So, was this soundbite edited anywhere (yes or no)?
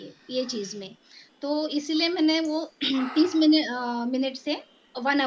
no